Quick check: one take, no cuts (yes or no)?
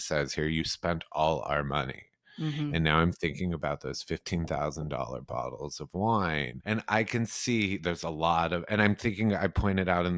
no